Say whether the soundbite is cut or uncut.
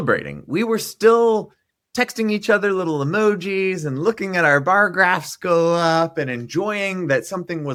uncut